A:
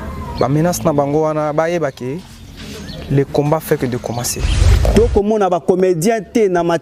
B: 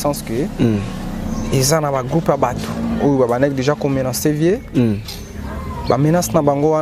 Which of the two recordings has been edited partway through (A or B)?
A